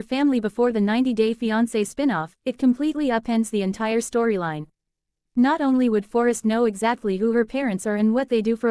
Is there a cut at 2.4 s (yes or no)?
no